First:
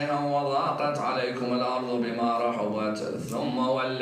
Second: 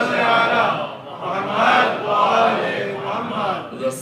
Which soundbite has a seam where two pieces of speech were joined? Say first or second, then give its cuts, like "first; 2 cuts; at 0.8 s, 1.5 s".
first; 1 cut; at 1.0 s